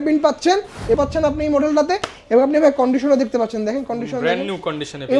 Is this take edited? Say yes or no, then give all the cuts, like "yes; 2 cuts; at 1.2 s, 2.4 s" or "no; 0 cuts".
yes; 1 cut; at 1.0 s